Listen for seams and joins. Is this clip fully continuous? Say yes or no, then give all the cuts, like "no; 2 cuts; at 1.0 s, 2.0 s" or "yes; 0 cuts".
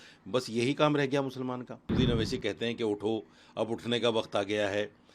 no; 1 cut; at 1.9 s